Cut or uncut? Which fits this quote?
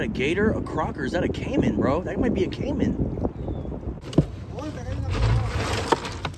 cut